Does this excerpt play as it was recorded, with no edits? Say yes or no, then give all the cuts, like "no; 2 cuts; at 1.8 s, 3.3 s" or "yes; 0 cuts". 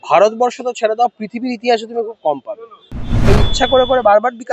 no; 1 cut; at 3.3 s